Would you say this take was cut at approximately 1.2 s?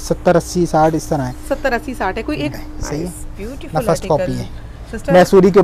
no; 1 cut; at 2.5 s

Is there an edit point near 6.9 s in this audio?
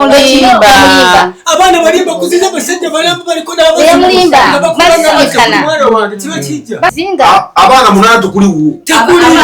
yes; 1 cut; at 6.9 s

